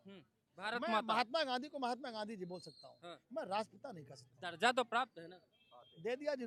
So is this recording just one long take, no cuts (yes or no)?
yes